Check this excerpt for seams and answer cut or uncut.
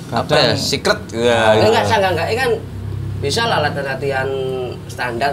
uncut